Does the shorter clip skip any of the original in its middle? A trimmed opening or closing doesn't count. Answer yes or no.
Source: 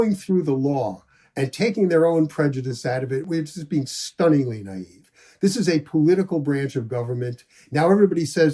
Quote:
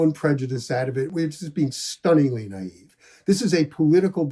no